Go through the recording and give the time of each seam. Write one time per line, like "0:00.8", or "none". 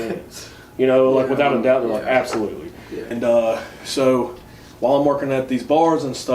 0:02.9